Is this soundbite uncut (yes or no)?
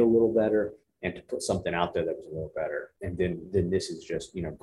no